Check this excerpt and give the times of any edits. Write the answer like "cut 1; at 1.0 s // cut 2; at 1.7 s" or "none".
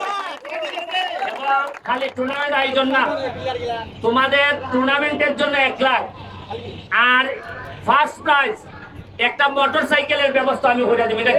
none

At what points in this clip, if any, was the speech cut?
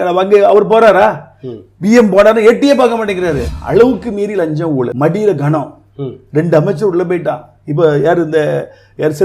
cut 1; at 3.5 s // cut 2; at 4.9 s

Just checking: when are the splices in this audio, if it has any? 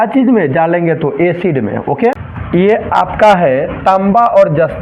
cut 1; at 2.3 s

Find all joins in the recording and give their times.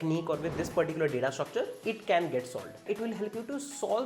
cut 1; at 2.8 s

